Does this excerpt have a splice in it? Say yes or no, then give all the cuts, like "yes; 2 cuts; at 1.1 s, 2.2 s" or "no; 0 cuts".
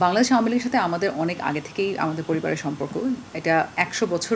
no; 0 cuts